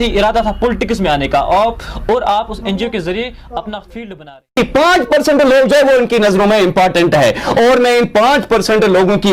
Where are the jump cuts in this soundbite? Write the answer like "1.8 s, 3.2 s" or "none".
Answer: 4.6 s